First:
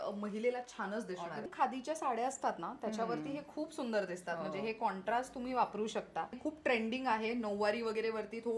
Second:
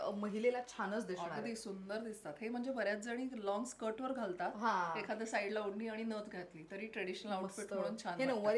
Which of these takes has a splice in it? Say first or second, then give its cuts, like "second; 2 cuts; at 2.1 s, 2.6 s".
first; 2 cuts; at 1.5 s, 6.4 s